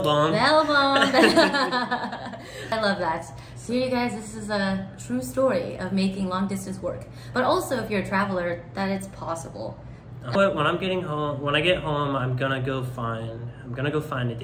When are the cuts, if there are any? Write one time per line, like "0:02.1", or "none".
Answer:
0:02.7
0:10.3